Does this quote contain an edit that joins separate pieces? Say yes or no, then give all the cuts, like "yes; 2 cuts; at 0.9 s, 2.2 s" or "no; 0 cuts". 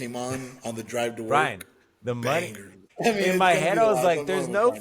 yes; 1 cut; at 2.9 s